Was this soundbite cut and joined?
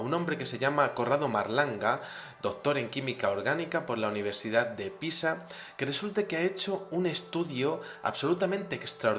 yes; 1 cut; at 3.0 s

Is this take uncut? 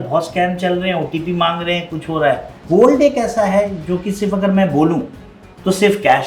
no; 1 cut; at 2.6 s

